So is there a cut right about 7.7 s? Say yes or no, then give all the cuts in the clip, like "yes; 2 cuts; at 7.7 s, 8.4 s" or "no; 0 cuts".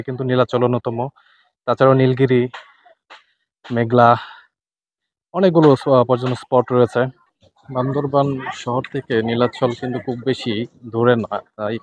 yes; 1 cut; at 7.7 s